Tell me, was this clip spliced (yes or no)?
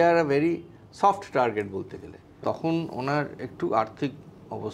yes